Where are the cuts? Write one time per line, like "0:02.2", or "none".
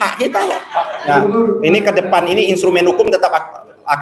0:01.0